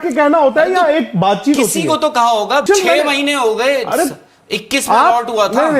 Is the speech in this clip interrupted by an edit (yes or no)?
yes